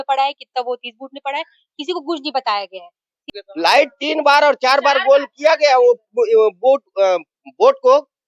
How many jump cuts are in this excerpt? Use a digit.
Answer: 1